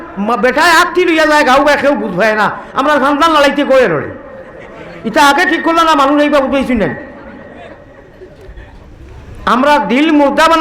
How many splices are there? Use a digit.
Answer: 1